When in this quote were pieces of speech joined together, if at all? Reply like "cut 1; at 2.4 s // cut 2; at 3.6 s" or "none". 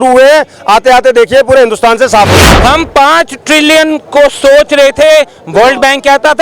cut 1; at 2.4 s